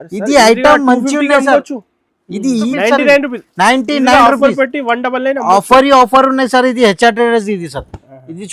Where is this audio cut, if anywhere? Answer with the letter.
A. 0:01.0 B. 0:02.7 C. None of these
B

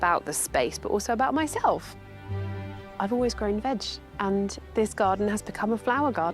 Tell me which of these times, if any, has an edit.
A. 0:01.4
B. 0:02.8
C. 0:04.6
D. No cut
C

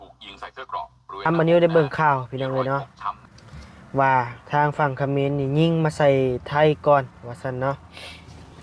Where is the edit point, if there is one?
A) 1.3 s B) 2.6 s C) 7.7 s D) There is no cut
A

